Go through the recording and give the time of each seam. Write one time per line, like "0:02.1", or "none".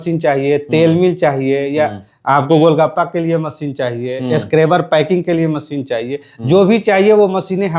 none